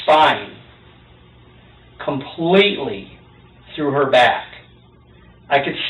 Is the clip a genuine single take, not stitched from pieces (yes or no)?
yes